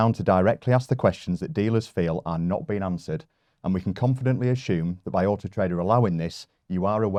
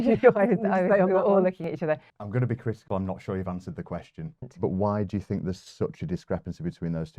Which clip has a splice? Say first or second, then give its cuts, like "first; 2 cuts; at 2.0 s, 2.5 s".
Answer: second; 2 cuts; at 2.1 s, 4.4 s